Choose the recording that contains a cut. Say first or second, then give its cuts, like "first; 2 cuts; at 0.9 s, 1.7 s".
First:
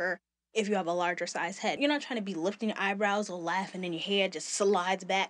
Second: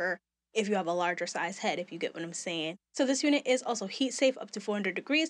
first; 1 cut; at 1.8 s